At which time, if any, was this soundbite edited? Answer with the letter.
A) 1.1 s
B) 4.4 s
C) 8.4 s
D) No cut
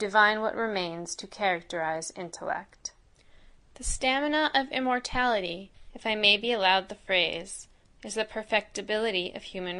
D